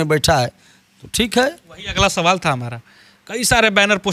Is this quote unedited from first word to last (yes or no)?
yes